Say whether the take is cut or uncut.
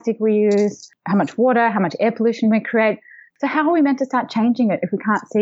cut